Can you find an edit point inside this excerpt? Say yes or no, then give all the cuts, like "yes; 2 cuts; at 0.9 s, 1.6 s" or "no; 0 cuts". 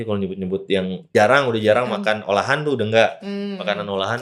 yes; 1 cut; at 1.0 s